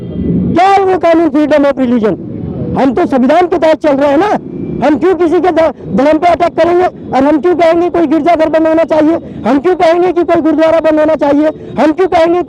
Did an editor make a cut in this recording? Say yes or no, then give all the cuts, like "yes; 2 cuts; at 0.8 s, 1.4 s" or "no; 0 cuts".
no; 0 cuts